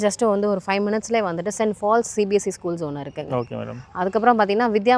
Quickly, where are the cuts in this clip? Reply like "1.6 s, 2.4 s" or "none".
none

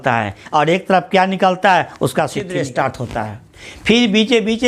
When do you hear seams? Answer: none

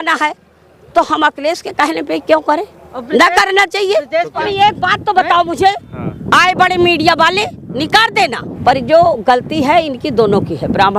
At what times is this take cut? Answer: 4.4 s, 8.5 s

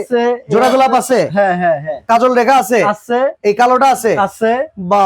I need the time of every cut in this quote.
1.9 s, 3.4 s

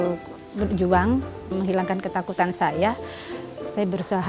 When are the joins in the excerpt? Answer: 1.5 s

